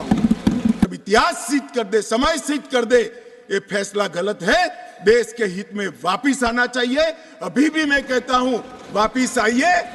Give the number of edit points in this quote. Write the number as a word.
one